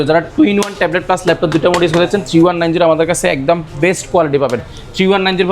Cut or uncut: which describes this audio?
uncut